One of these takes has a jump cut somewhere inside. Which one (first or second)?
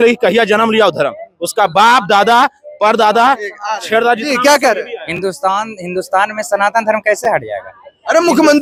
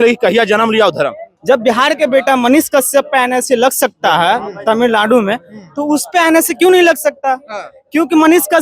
second